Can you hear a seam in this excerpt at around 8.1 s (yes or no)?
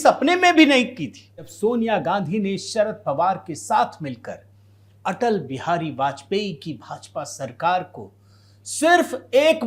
no